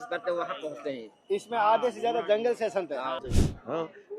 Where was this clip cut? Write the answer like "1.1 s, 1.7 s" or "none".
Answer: 3.2 s